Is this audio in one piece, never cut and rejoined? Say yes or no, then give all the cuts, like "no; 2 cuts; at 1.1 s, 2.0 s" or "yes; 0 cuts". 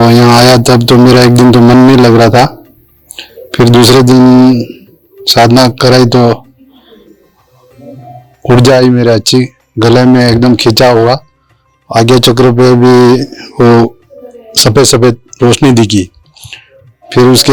yes; 0 cuts